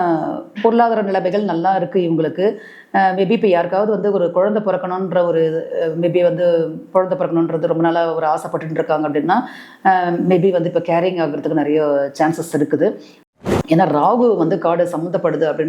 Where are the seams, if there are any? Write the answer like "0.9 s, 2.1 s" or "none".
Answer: 13.1 s

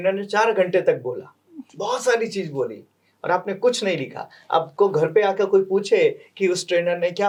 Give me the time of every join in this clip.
none

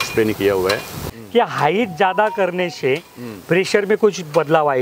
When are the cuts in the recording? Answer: 1.1 s

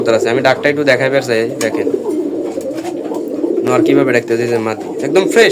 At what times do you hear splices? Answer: none

